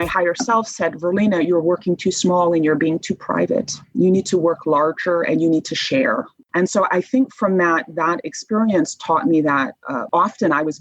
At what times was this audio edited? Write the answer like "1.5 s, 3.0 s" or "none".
6.3 s